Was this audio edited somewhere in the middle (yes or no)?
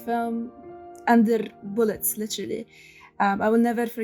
no